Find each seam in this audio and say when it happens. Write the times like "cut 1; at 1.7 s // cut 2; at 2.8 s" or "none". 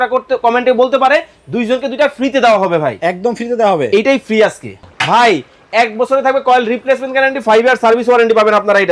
cut 1; at 4.9 s